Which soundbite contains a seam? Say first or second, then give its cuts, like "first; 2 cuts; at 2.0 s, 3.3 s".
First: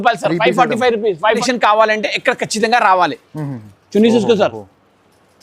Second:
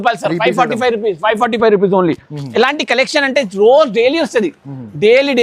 first; 1 cut; at 1.4 s